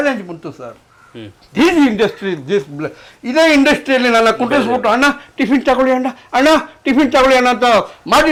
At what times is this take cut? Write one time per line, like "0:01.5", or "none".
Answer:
none

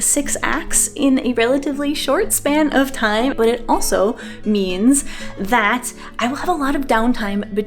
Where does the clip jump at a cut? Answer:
0:03.3

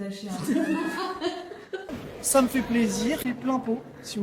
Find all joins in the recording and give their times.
0:02.0

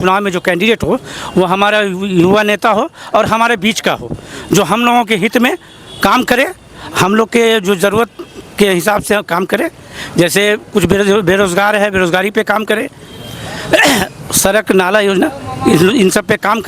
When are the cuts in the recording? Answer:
none

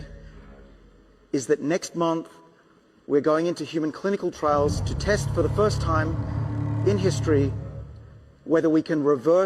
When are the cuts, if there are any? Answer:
none

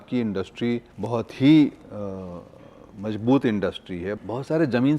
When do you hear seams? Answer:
0:00.9
0:04.2

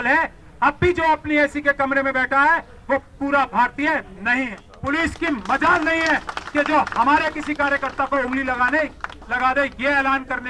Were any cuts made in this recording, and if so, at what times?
0:04.7

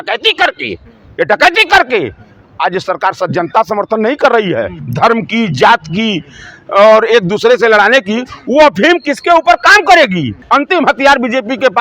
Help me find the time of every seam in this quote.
0:04.8
0:10.4

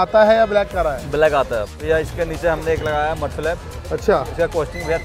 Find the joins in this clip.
0:01.8

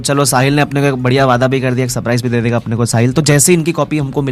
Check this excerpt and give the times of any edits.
none

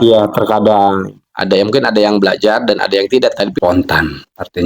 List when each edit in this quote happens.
0:03.5

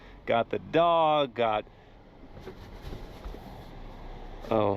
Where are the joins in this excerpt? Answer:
none

